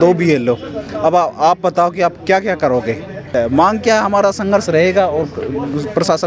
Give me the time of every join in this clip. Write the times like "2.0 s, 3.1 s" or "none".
3.3 s